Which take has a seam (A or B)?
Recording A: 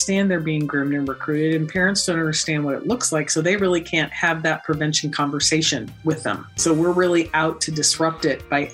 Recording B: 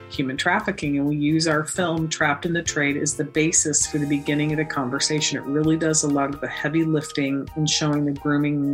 A